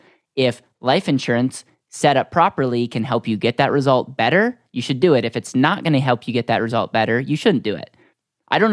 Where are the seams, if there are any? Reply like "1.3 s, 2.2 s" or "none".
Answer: none